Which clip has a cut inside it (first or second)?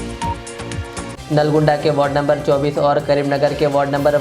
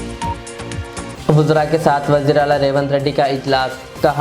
second